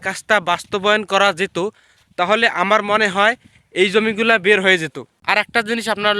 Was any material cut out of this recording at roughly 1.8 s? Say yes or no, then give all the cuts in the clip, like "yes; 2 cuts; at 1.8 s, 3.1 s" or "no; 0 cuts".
no; 1 cut; at 5.2 s